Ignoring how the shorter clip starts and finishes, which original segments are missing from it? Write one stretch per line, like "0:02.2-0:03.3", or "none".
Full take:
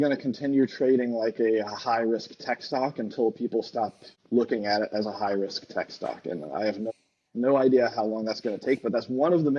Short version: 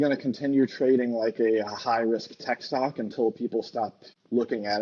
none